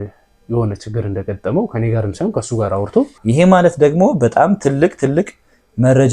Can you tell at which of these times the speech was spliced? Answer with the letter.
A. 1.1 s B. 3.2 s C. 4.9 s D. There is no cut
B